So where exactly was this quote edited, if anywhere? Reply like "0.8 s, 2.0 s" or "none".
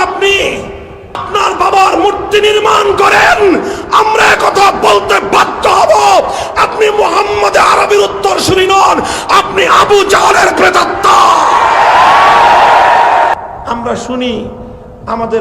1.2 s, 13.3 s